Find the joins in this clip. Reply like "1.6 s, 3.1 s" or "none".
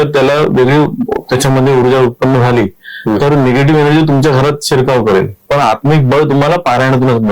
5.4 s